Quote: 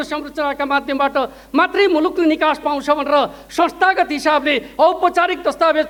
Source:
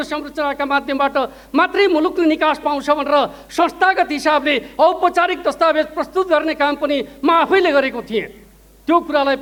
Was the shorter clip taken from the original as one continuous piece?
yes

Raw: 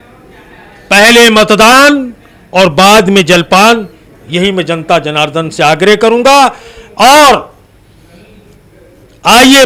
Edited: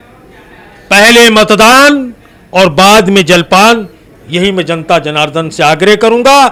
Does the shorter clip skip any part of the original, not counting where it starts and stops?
no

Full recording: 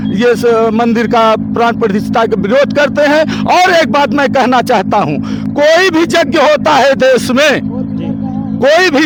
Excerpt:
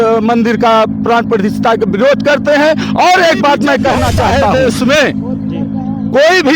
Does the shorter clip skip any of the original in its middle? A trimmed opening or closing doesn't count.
yes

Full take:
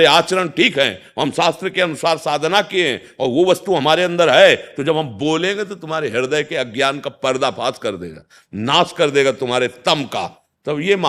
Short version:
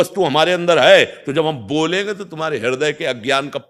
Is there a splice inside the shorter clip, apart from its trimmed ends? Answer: no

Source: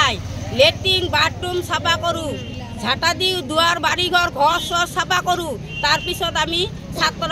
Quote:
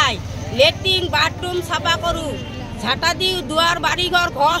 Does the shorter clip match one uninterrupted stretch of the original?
yes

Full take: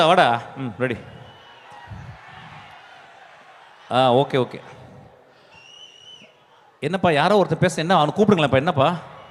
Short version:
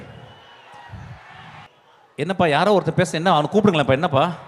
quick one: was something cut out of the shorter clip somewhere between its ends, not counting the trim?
yes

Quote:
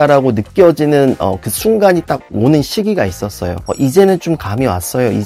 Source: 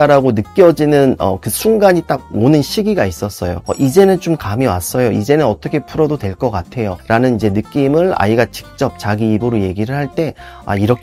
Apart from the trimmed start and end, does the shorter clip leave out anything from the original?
no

